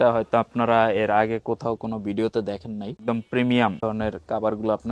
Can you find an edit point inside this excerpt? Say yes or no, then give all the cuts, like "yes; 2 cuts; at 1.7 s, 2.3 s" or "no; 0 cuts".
yes; 2 cuts; at 2.9 s, 3.8 s